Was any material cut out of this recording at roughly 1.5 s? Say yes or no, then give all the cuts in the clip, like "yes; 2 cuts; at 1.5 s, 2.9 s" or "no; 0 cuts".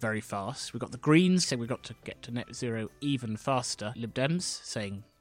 yes; 2 cuts; at 1.5 s, 3.9 s